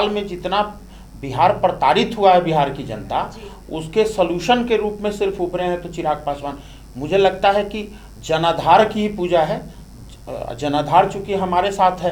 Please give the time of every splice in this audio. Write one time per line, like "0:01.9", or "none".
none